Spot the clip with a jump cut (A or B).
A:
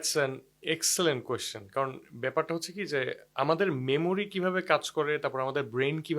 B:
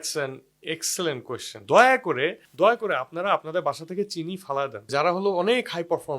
B